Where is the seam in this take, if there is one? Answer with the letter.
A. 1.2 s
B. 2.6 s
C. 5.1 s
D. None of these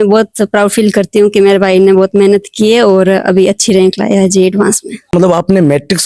C